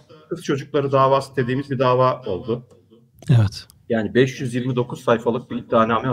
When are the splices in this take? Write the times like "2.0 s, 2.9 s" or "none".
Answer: none